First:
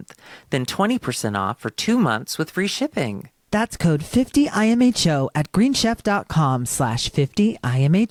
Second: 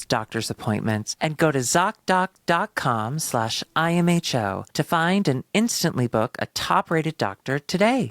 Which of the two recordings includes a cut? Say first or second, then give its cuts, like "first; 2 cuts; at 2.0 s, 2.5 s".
second; 1 cut; at 1.1 s